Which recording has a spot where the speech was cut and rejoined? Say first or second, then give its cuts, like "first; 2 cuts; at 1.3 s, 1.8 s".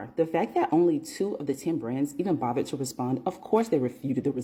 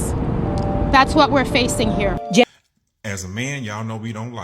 second; 1 cut; at 2.4 s